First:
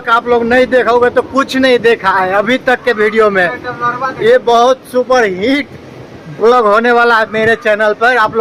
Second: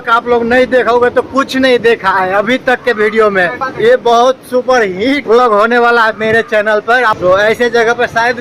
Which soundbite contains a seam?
second; 3 cuts; at 3.6 s, 5.2 s, 7.1 s

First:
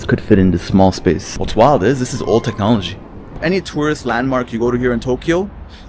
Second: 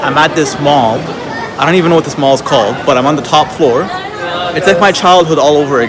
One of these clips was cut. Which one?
first; 2 cuts; at 1.4 s, 3.4 s

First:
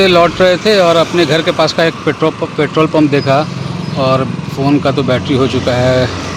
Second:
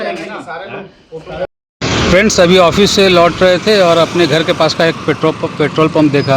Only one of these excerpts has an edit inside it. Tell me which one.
second; 1 cut; at 1.5 s

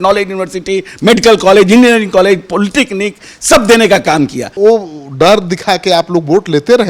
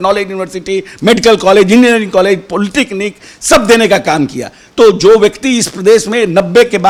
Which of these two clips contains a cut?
first; 1 cut; at 4.5 s

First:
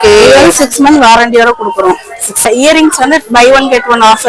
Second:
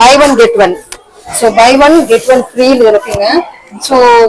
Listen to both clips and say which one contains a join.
first; 1 cut; at 2.5 s

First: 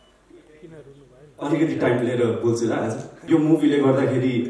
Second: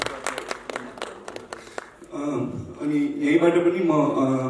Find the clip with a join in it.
first; 1 cut; at 3.1 s

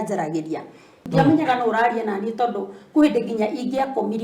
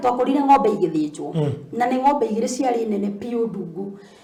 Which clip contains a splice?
first; 1 cut; at 1.0 s

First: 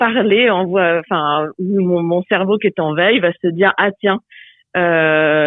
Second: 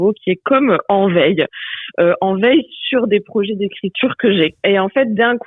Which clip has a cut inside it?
second; 1 cut; at 4.6 s

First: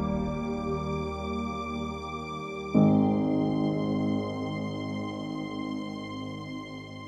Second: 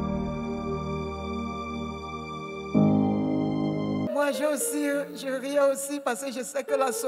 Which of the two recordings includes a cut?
second; 1 cut; at 4.1 s

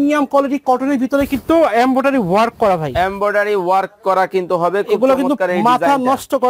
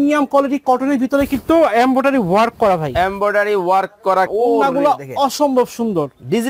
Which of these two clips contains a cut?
second; 1 cut; at 4.3 s

